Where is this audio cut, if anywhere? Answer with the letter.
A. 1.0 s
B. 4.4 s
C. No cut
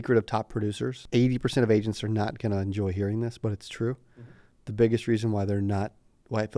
A